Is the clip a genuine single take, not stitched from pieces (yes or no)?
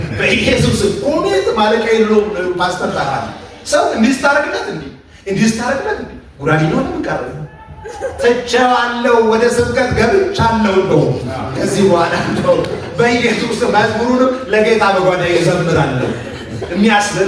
yes